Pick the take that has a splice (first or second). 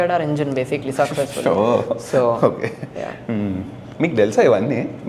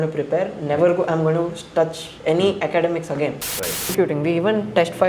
second